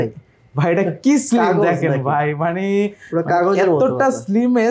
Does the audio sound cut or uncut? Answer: uncut